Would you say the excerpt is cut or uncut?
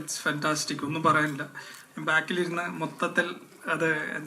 uncut